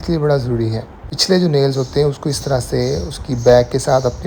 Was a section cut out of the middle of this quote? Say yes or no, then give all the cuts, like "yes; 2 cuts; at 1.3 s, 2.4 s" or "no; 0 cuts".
yes; 1 cut; at 1.1 s